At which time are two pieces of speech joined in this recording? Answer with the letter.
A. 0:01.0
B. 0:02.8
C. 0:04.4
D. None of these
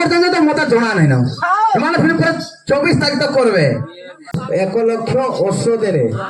C